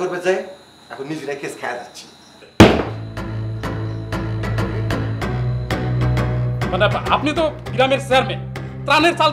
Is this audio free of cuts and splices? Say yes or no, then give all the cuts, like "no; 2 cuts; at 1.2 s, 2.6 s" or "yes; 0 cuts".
no; 1 cut; at 2.3 s